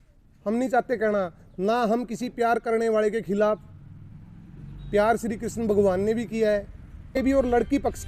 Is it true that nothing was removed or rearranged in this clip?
no; 1 cut; at 7.0 s

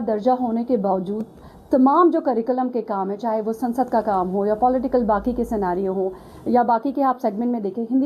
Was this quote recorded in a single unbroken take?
yes; 0 cuts

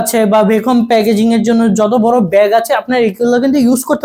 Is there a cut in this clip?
no; 0 cuts

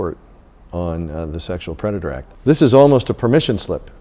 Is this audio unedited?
no; 1 cut; at 2.3 s

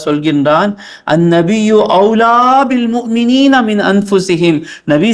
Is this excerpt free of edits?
yes; 0 cuts

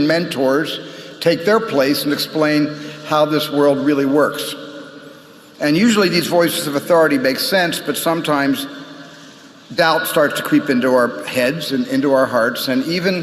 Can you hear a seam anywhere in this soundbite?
yes; 1 cut; at 3.3 s

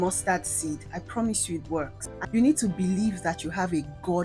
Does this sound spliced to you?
yes; 1 cut; at 2.1 s

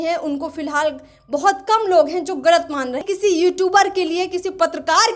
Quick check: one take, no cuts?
no; 1 cut; at 3.0 s

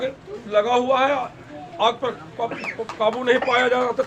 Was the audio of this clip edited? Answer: no; 0 cuts

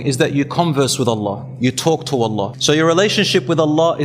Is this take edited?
yes; 1 cut; at 2.5 s

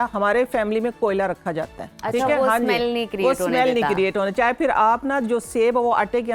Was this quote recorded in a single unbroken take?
yes; 0 cuts

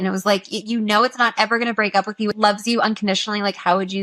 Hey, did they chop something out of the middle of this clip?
yes; 1 cut; at 2.3 s

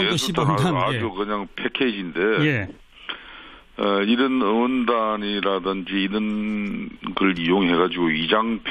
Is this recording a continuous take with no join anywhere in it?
no; 1 cut; at 7.6 s

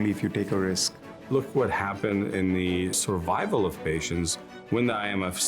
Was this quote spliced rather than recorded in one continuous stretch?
yes; 2 cuts; at 1.2 s, 3.0 s

